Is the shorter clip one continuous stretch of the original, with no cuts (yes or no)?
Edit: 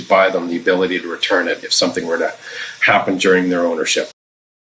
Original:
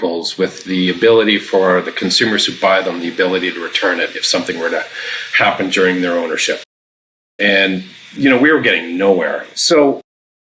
yes